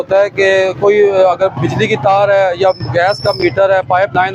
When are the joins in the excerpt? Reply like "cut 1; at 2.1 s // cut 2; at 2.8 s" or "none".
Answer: none